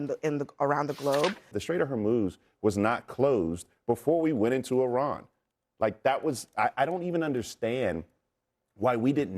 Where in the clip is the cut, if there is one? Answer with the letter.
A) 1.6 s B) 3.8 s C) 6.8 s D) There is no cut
A